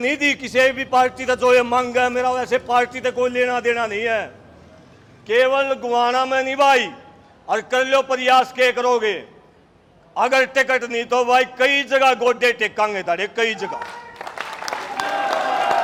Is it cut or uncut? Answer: uncut